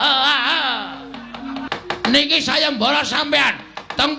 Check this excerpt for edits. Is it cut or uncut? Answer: uncut